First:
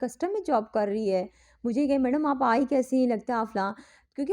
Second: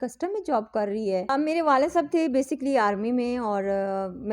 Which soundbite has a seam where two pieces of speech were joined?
second; 1 cut; at 1.3 s

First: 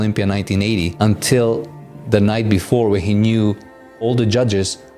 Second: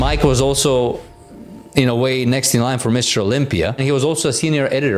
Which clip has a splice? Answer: first; 1 cut; at 0.9 s

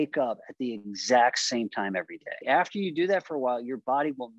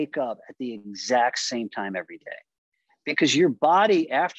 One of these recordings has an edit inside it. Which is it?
first; 1 cut; at 2.4 s

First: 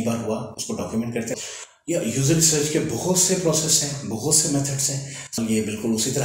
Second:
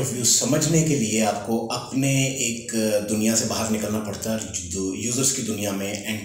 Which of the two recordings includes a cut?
first; 2 cuts; at 1.3 s, 5.4 s

